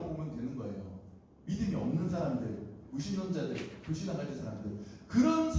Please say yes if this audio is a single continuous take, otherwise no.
yes